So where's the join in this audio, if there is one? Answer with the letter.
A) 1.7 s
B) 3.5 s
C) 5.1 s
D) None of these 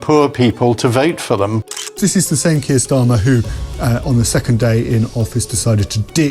A